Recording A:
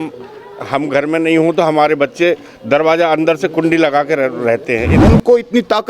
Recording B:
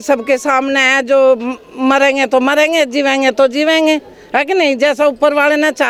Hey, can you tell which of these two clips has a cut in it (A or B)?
A